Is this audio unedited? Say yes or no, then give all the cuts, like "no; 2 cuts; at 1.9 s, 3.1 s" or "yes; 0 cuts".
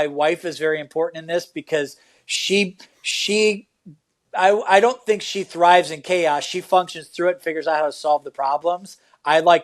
yes; 0 cuts